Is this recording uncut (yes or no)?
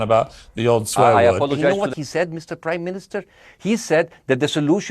no